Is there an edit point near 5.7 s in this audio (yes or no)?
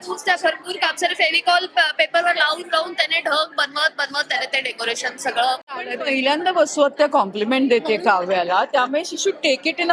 yes